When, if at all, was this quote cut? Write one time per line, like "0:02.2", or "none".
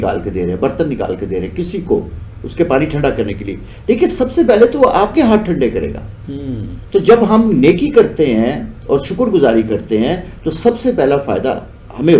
none